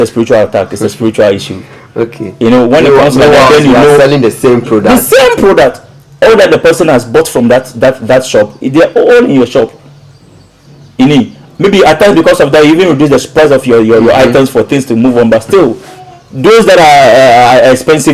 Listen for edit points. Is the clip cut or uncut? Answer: uncut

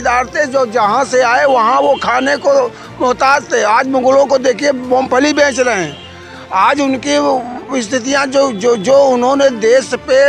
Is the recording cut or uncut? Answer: uncut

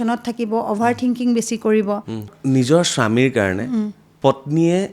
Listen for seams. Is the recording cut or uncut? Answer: cut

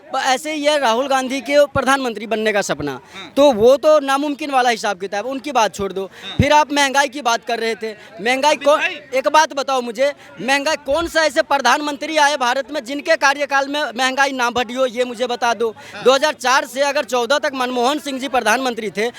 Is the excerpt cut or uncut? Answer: uncut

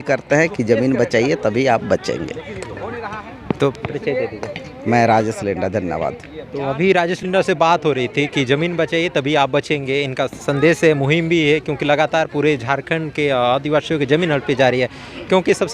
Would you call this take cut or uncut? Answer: uncut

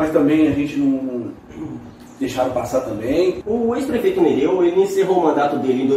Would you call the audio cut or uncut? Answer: cut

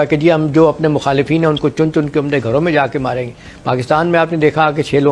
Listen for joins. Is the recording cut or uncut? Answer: uncut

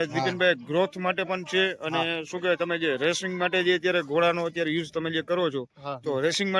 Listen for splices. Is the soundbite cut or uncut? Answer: uncut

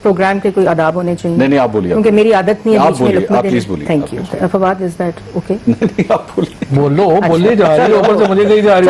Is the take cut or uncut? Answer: uncut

